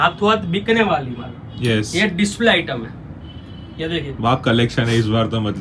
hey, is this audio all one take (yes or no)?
yes